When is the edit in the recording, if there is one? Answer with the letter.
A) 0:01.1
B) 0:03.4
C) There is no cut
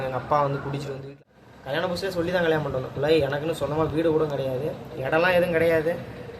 A